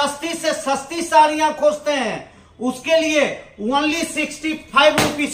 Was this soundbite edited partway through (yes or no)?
no